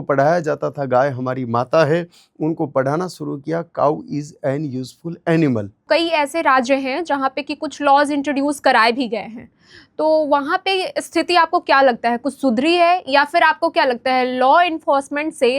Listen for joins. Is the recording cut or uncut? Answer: cut